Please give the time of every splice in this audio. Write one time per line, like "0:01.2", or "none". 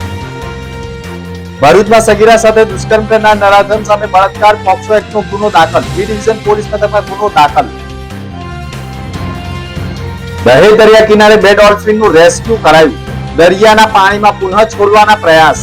0:01.5